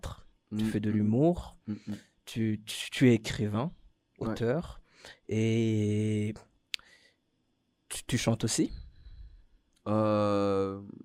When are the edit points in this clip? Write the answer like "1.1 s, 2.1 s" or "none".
none